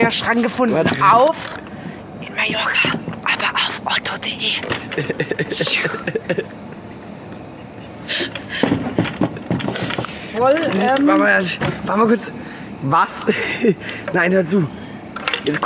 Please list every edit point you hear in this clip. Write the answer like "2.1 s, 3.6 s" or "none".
none